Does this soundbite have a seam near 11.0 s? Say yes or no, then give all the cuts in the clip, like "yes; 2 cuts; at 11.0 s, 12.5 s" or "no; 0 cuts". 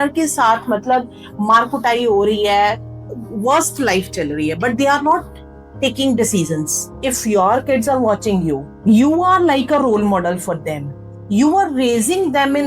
no; 2 cuts; at 7.1 s, 8.7 s